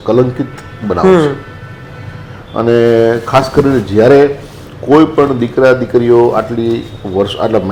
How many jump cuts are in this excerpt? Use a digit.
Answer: 0